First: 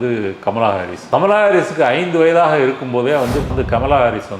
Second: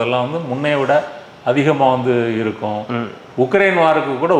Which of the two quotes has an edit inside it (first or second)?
first